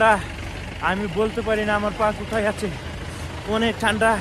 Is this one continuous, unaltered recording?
yes; 0 cuts

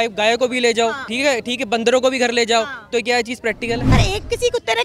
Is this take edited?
yes; 2 cuts; at 1.1 s, 3.9 s

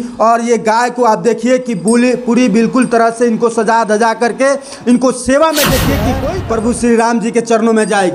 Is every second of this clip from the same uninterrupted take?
no; 1 cut; at 6.2 s

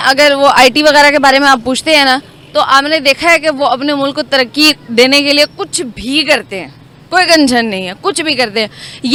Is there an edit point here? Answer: no; 0 cuts

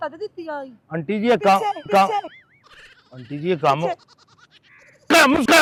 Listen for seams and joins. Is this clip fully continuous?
yes; 0 cuts

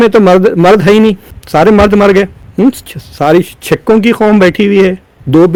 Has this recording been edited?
no; 0 cuts

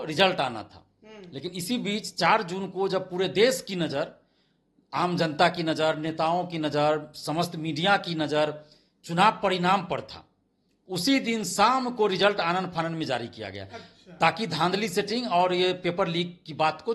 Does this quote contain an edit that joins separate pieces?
no; 0 cuts

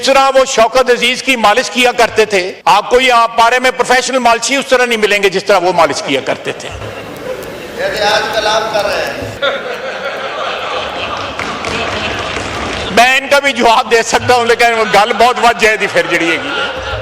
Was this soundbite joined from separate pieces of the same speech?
yes; 3 cuts; at 2.5 s, 9.4 s, 12.8 s

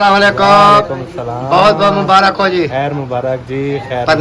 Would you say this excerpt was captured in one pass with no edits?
yes; 0 cuts

